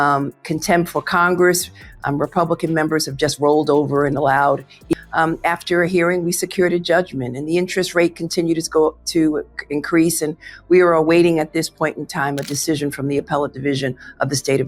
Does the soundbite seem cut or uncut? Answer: uncut